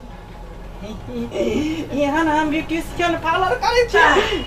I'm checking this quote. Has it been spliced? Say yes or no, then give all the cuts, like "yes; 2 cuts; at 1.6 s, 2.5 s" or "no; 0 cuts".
no; 0 cuts